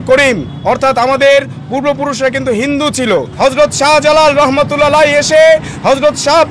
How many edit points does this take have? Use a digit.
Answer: 1